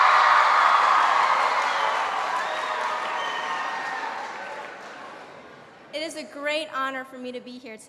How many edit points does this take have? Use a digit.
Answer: 0